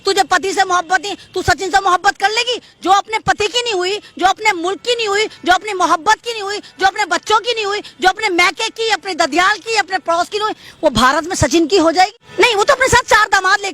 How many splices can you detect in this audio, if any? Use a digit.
1